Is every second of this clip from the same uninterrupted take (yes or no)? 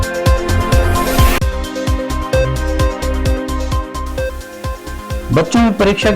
no